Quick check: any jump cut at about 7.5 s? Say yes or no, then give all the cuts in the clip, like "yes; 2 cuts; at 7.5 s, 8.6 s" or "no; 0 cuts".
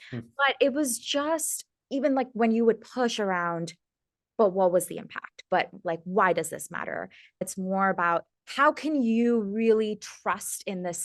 yes; 1 cut; at 7.5 s